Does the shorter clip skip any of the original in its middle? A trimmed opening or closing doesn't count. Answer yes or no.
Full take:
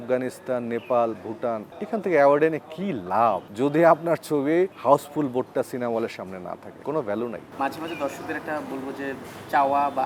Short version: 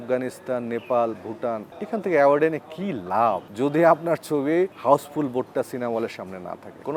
no